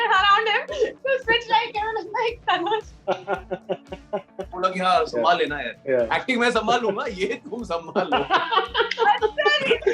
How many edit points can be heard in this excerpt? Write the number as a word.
one